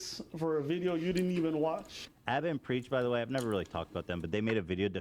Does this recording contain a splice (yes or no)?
yes